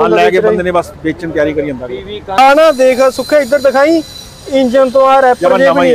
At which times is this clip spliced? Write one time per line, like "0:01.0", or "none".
0:02.4